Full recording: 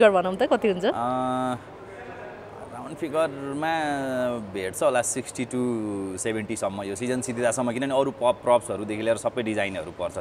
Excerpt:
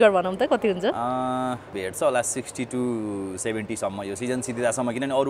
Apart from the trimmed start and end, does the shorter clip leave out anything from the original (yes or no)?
yes